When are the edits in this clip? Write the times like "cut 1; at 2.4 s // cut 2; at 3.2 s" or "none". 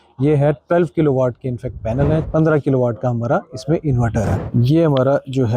cut 1; at 2.3 s // cut 2; at 4.5 s